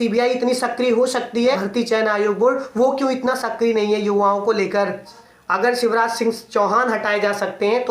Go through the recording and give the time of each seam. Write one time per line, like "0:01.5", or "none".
0:01.6
0:05.2